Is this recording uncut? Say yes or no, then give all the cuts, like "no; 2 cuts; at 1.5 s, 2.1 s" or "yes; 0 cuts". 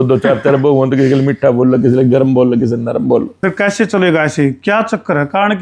no; 1 cut; at 3.3 s